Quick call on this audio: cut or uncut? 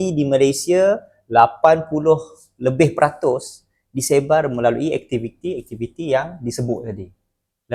uncut